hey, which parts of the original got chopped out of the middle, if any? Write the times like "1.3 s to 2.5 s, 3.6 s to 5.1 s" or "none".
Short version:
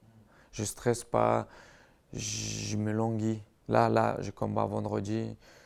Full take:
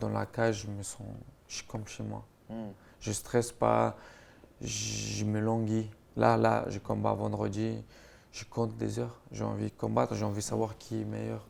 none